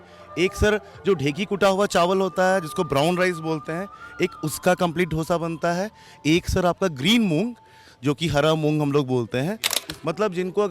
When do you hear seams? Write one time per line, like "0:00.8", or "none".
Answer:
0:09.7